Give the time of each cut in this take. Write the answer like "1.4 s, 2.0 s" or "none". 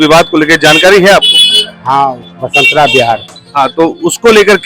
2.3 s, 3.4 s

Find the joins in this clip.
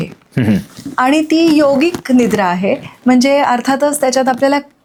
none

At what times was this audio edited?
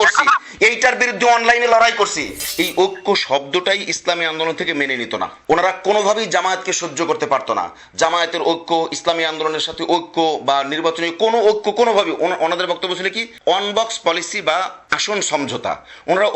2.4 s

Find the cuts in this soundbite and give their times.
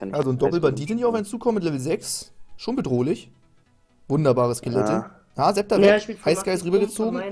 none

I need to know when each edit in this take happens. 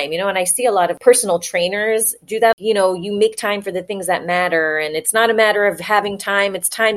1.0 s, 2.5 s

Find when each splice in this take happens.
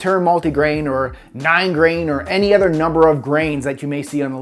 none

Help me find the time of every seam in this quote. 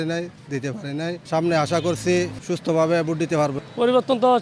1.2 s, 2.4 s, 3.6 s

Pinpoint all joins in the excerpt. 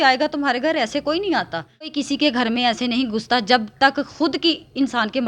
1.9 s

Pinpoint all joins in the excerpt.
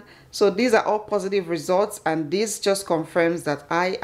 none

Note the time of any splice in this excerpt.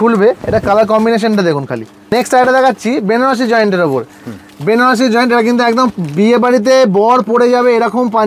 2.1 s

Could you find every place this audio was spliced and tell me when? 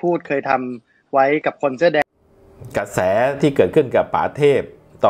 2.0 s

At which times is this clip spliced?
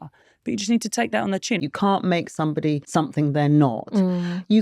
1.6 s, 2.8 s

